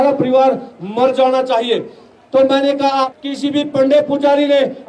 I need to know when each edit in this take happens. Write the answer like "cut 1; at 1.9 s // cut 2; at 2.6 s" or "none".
cut 1; at 3.1 s